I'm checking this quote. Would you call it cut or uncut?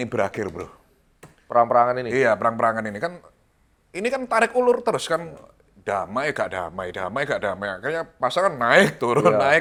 uncut